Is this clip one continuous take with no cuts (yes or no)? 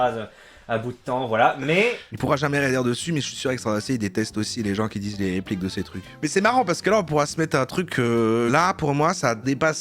no